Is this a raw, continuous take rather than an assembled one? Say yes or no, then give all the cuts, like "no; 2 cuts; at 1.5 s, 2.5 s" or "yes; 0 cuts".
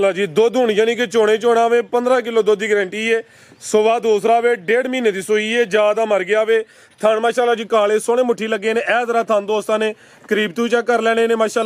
yes; 0 cuts